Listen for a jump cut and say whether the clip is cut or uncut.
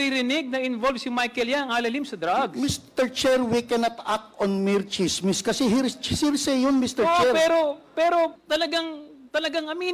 cut